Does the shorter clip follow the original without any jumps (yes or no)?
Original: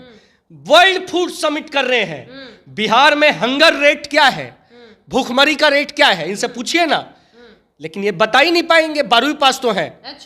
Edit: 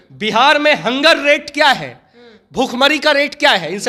yes